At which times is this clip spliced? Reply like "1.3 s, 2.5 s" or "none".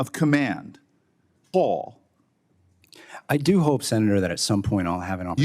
1.4 s